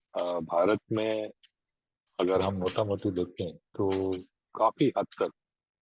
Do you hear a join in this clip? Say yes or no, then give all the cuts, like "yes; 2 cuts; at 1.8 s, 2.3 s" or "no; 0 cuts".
no; 0 cuts